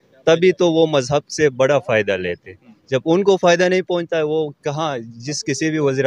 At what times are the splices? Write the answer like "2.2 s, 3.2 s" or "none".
none